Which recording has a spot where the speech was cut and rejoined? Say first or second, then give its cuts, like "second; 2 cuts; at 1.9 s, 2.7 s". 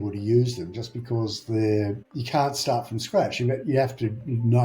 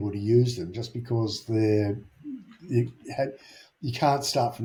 first; 1 cut; at 2.1 s